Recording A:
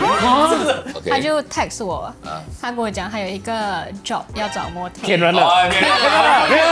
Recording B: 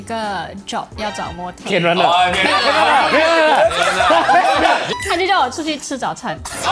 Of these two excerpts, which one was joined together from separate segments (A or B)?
A